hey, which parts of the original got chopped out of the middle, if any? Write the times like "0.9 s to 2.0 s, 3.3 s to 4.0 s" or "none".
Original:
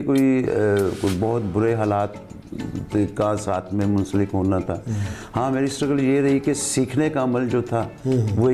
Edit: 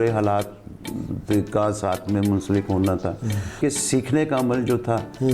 5.2 s to 6.4 s